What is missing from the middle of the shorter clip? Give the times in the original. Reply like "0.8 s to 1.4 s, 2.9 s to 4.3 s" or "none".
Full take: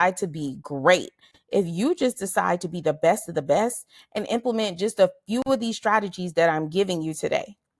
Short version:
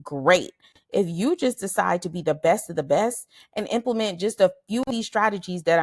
5.5 s to 5.6 s